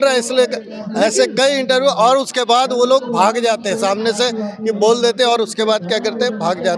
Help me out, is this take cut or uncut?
uncut